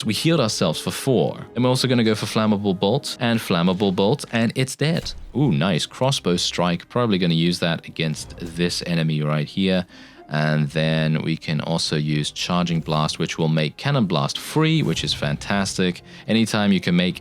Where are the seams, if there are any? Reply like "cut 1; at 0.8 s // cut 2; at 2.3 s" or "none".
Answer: cut 1; at 1.4 s // cut 2; at 3.1 s // cut 3; at 5.3 s

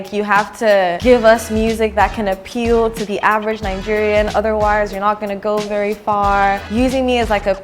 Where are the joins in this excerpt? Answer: cut 1; at 1.0 s // cut 2; at 6.7 s

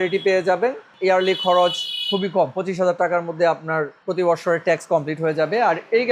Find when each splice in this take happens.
cut 1; at 0.9 s // cut 2; at 4.0 s

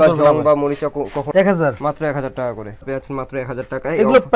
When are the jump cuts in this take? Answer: cut 1; at 1.3 s // cut 2; at 2.8 s

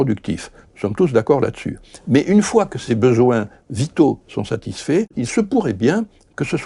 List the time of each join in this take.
cut 1; at 2.8 s // cut 2; at 5.2 s

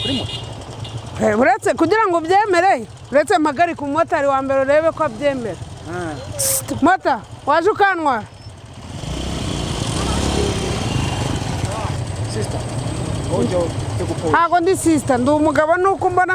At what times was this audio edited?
cut 1; at 12.0 s

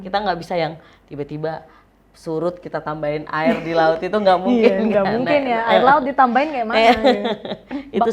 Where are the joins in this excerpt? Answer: none

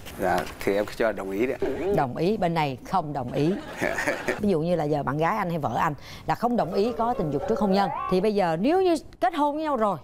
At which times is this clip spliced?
cut 1; at 4.4 s

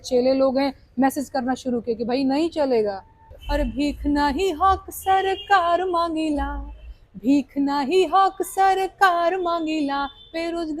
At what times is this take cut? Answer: cut 1; at 3.4 s

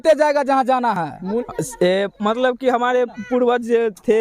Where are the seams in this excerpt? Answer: cut 1; at 1.4 s

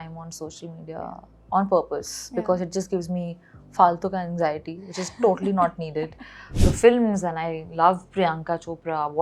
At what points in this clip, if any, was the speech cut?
cut 1; at 6.5 s

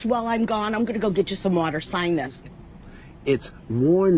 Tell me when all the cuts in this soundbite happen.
cut 1; at 2.4 s

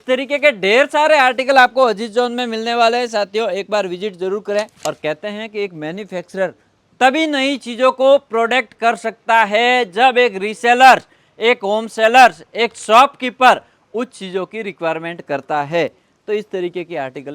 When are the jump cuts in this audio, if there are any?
cut 1; at 4.7 s

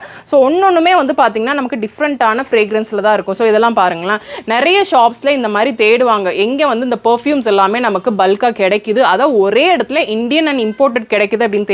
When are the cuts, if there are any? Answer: none

